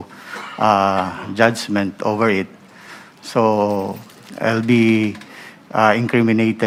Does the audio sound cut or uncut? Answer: uncut